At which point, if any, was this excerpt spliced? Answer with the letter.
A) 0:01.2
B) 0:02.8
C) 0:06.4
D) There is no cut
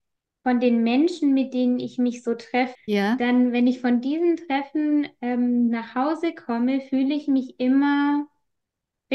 B